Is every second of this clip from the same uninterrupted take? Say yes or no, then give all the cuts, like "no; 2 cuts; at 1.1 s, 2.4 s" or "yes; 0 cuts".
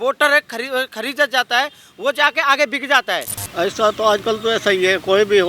no; 1 cut; at 3.4 s